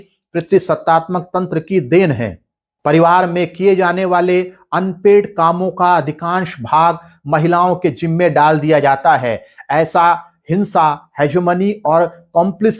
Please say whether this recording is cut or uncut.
uncut